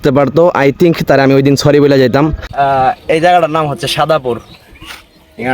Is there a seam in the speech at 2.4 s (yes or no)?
yes